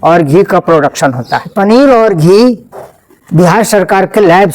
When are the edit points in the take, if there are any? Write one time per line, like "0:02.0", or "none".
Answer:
0:01.5